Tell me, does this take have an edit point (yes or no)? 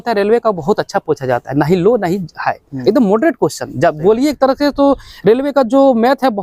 no